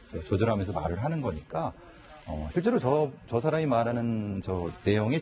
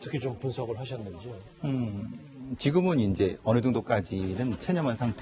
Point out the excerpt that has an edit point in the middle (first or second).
first